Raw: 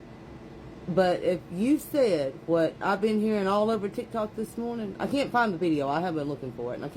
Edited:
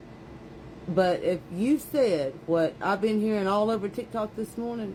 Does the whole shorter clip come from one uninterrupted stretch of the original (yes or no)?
yes